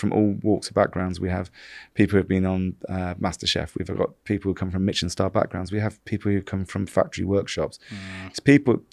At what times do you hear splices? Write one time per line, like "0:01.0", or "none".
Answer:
none